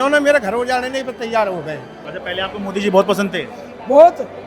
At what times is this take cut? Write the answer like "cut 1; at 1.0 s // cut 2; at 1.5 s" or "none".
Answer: cut 1; at 1.9 s